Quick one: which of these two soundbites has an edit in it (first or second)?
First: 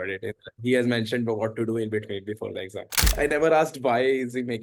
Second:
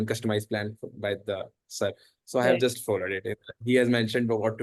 first